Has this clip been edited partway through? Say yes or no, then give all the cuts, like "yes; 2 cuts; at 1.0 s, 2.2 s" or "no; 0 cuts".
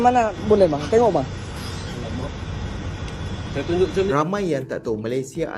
yes; 1 cut; at 4.1 s